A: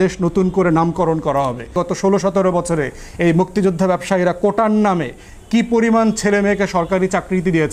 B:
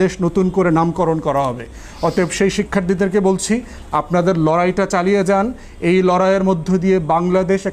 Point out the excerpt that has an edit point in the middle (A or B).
A